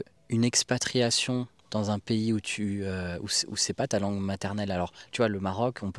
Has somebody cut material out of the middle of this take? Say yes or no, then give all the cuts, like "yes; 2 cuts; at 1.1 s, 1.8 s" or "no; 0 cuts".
no; 0 cuts